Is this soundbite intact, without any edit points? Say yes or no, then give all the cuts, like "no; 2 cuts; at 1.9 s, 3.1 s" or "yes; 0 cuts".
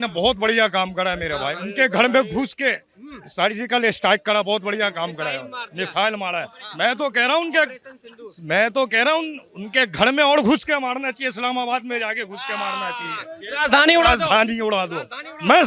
yes; 0 cuts